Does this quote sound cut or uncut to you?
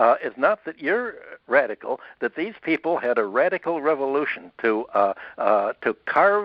uncut